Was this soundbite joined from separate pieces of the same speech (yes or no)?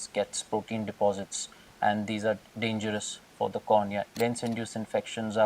yes